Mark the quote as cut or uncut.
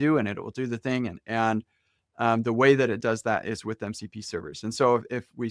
uncut